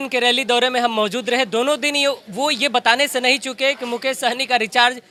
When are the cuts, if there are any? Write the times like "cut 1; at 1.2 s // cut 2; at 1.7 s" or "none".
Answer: none

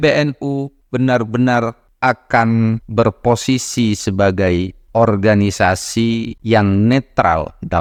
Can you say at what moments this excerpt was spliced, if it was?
none

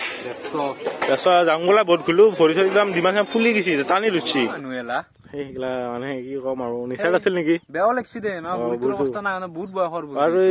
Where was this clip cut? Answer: cut 1; at 4.6 s

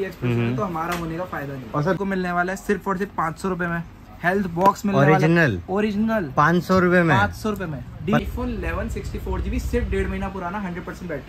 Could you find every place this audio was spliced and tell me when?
cut 1; at 2.0 s // cut 2; at 8.2 s

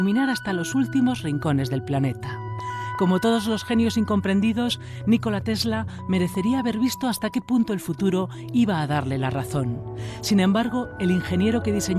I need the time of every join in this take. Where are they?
cut 1; at 9.2 s

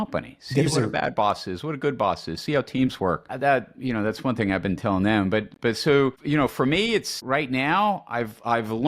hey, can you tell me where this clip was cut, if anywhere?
cut 1; at 3.3 s // cut 2; at 6.2 s // cut 3; at 7.2 s

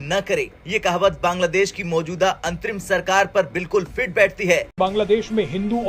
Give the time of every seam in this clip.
cut 1; at 4.8 s

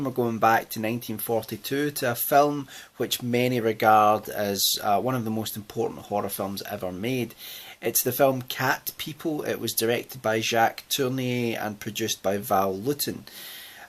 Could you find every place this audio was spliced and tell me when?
cut 1; at 8.5 s

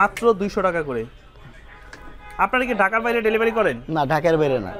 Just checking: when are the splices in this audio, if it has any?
none

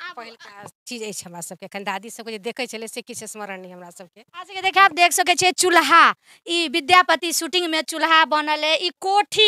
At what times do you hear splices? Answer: none

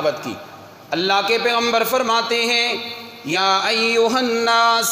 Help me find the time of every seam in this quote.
cut 1; at 3.3 s

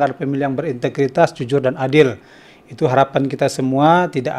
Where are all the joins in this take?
none

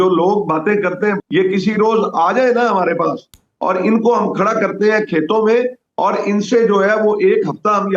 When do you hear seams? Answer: none

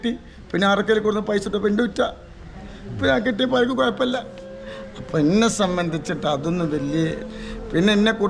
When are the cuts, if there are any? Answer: cut 1; at 7.2 s

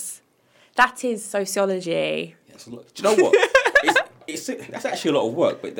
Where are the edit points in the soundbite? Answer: none

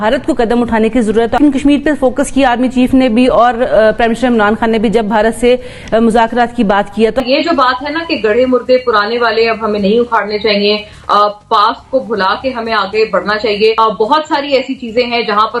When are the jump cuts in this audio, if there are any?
cut 1; at 1.4 s // cut 2; at 7.2 s // cut 3; at 13.8 s

